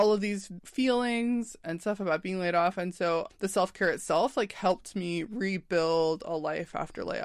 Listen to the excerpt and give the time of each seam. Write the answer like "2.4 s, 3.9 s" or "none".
3.3 s